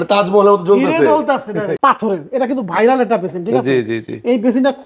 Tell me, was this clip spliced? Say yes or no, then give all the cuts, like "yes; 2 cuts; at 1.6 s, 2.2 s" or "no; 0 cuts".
yes; 1 cut; at 1.7 s